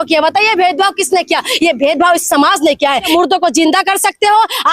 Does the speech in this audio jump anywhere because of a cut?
yes; 1 cut; at 3.1 s

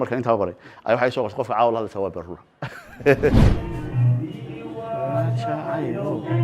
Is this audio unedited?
no; 1 cut; at 3.5 s

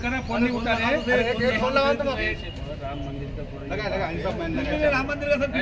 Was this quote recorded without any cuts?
yes; 0 cuts

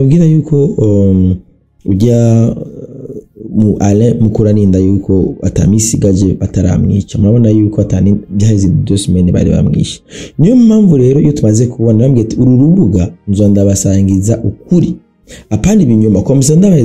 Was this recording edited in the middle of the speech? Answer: no; 0 cuts

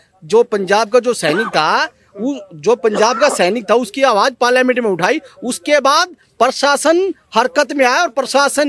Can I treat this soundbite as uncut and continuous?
yes; 0 cuts

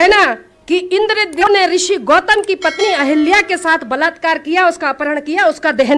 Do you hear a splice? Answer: yes; 1 cut; at 1.4 s

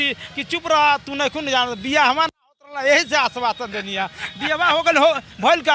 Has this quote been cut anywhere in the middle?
no; 0 cuts

